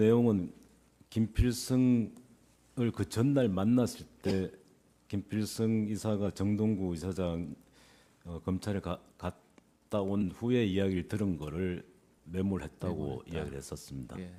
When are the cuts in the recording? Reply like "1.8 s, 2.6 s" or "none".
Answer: none